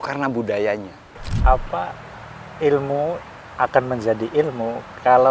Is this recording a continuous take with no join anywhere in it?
no; 1 cut; at 1.2 s

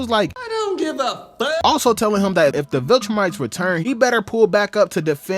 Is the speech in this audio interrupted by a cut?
yes; 1 cut; at 1.6 s

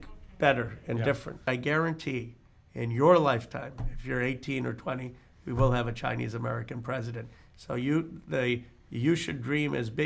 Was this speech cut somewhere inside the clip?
yes; 1 cut; at 1.4 s

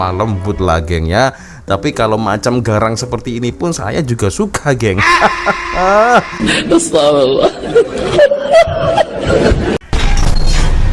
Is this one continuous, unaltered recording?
no; 1 cut; at 9.9 s

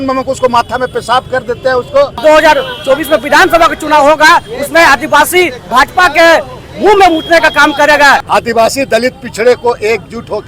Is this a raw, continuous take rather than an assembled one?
no; 2 cuts; at 2.2 s, 8.2 s

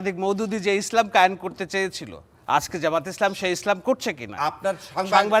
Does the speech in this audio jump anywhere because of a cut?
no; 0 cuts

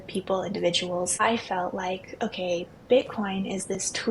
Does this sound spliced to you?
yes; 1 cut; at 1.2 s

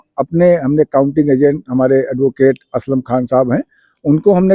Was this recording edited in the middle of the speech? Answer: no; 0 cuts

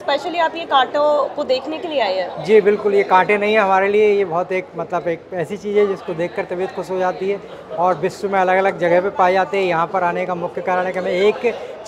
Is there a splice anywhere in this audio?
no; 0 cuts

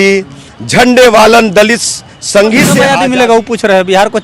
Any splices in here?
yes; 1 cut; at 2.9 s

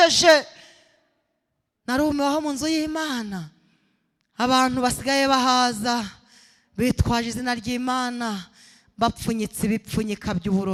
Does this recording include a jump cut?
no; 0 cuts

